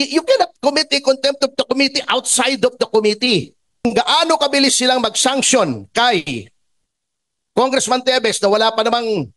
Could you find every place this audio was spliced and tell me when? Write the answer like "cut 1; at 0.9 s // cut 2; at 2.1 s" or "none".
cut 1; at 3.8 s